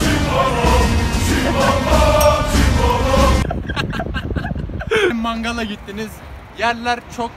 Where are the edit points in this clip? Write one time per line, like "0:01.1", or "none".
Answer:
0:05.1

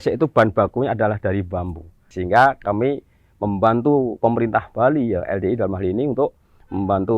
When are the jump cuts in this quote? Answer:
0:02.0

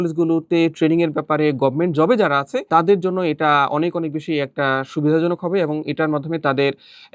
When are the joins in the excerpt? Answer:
none

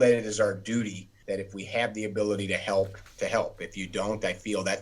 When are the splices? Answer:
0:01.1
0:03.0

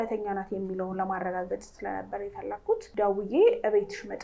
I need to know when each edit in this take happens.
0:02.9

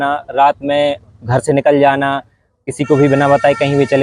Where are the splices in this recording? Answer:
none

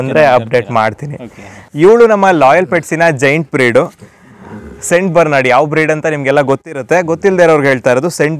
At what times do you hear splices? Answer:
0:01.6

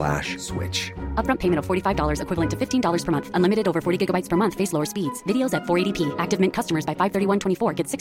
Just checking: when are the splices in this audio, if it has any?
none

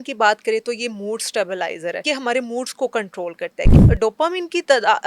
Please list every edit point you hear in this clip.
0:02.0
0:03.7

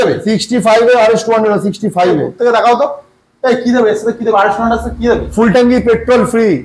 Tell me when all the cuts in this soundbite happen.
none

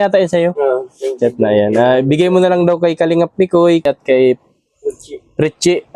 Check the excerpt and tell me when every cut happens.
0:03.9

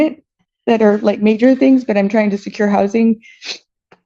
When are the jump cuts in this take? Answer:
none

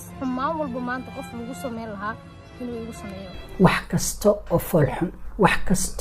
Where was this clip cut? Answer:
0:03.4

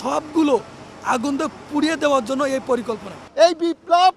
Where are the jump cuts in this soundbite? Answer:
0:03.2

